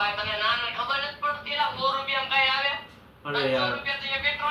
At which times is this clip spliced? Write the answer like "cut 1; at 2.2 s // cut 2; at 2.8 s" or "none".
none